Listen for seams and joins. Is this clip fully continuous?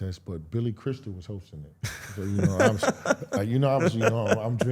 yes; 0 cuts

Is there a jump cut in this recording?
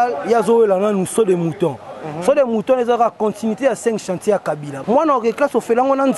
yes; 1 cut; at 4.7 s

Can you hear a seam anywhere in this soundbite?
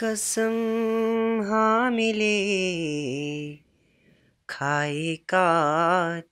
no; 0 cuts

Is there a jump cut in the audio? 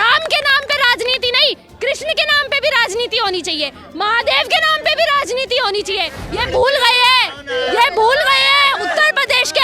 yes; 1 cut; at 6.2 s

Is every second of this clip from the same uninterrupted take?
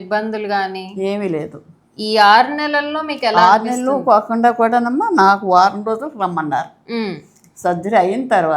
yes; 0 cuts

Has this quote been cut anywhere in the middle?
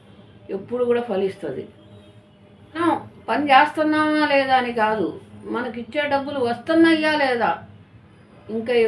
yes; 1 cut; at 2.8 s

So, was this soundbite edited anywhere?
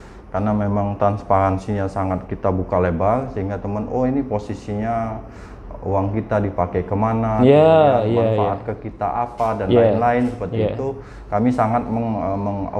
no; 0 cuts

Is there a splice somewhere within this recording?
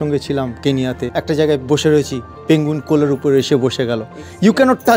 yes; 1 cut; at 1.1 s

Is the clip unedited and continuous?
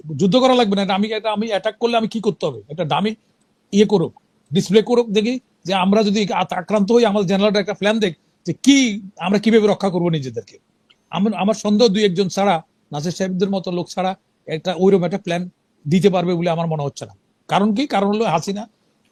yes; 0 cuts

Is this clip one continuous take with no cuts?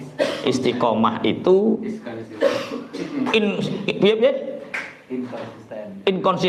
yes; 0 cuts

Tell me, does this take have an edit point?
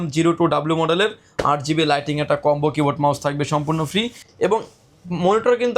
yes; 1 cut; at 4.2 s

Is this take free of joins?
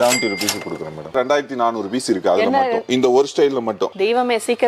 no; 1 cut; at 1.1 s

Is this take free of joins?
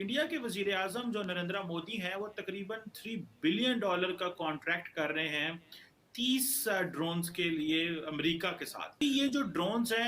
no; 1 cut; at 9.0 s

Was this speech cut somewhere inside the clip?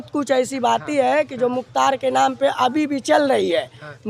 no; 0 cuts

